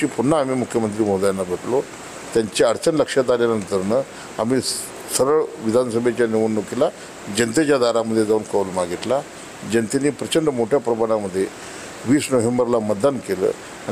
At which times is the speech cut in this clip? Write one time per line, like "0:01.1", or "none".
none